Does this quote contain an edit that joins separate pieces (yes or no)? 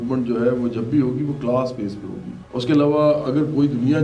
no